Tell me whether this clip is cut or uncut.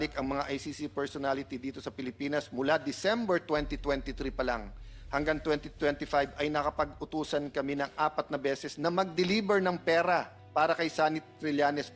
cut